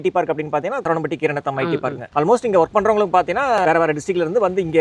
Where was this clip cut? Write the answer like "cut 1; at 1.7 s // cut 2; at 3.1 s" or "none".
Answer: cut 1; at 0.8 s // cut 2; at 2.0 s // cut 3; at 3.6 s